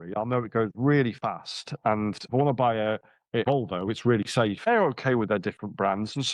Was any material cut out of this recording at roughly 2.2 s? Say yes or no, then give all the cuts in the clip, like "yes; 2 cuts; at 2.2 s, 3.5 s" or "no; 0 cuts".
yes; 3 cuts; at 2.2 s, 3.4 s, 4.7 s